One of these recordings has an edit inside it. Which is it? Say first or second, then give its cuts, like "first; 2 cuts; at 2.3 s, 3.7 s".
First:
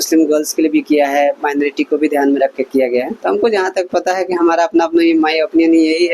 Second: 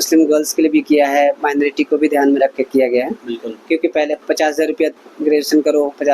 first; 1 cut; at 3.1 s